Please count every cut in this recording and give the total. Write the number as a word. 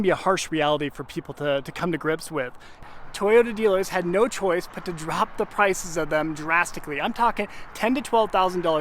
one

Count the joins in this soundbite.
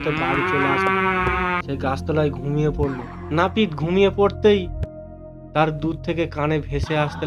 one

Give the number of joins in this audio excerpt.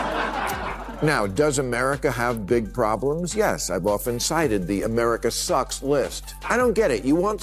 one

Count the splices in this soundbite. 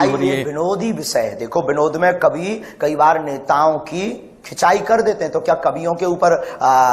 zero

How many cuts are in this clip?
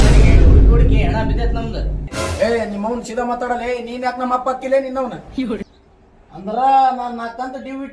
two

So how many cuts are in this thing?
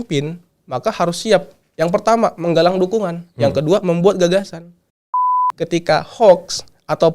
one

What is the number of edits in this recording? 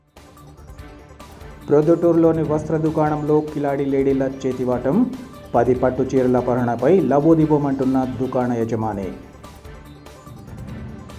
one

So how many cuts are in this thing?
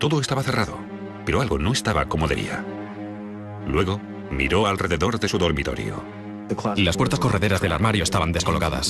one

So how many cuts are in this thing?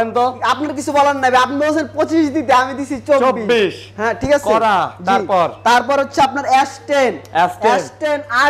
zero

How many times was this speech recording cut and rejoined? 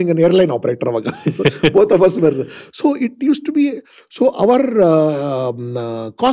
zero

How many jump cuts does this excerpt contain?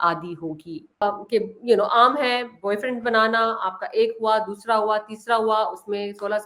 one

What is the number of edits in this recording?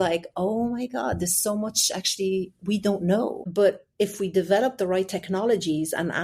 one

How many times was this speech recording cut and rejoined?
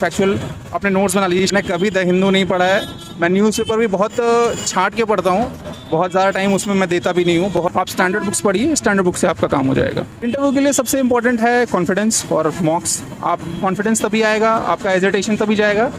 three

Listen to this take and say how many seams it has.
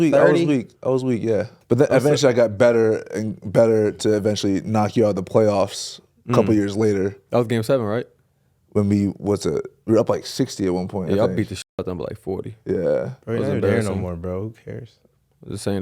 one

